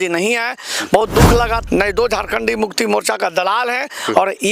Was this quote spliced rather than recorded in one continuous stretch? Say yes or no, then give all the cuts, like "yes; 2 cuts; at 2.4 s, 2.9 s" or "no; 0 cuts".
yes; 1 cut; at 1.6 s